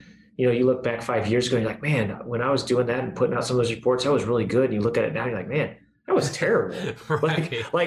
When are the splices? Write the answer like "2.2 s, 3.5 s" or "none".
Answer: none

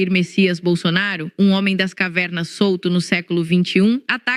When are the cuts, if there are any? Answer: none

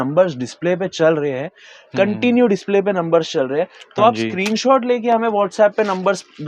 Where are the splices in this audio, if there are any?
none

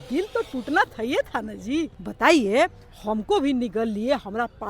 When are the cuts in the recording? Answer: 2.0 s

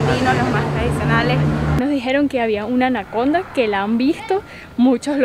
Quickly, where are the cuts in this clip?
1.8 s

